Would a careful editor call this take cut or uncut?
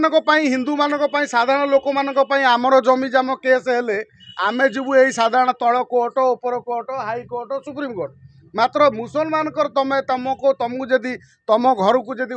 uncut